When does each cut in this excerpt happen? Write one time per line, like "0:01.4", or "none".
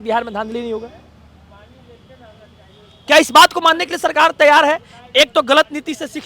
none